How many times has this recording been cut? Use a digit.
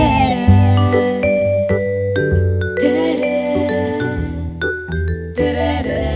1